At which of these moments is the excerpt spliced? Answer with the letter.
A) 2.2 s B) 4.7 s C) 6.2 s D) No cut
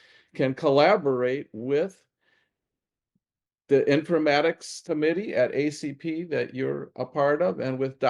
B